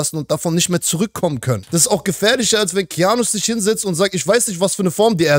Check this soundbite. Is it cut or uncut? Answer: cut